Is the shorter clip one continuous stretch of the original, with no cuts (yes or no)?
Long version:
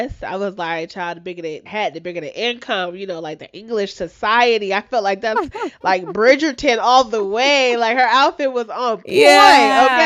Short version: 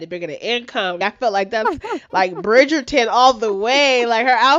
no